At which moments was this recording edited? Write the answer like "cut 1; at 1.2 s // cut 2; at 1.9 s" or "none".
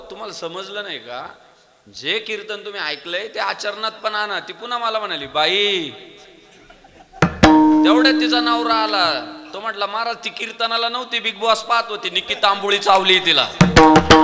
none